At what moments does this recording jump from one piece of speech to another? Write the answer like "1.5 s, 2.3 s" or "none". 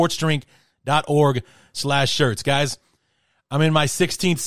none